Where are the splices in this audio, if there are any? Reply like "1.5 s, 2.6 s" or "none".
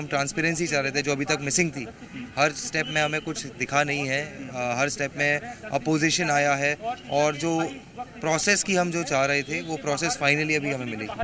none